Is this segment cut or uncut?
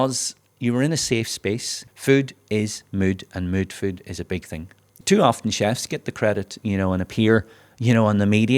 cut